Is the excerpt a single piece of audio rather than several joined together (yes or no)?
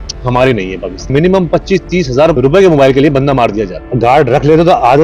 no